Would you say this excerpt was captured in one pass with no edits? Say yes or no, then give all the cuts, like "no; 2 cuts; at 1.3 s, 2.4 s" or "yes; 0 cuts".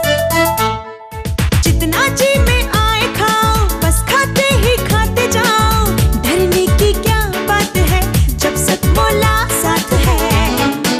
yes; 0 cuts